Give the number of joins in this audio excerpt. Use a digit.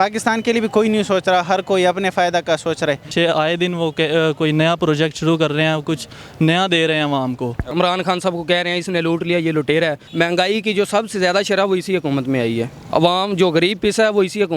3